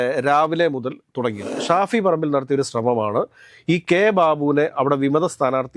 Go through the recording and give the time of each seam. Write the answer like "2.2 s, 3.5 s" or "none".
1.6 s